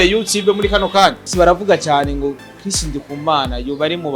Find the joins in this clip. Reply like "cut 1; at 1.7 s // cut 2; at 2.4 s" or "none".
cut 1; at 1.3 s